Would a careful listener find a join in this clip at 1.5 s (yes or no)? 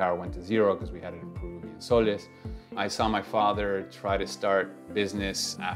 no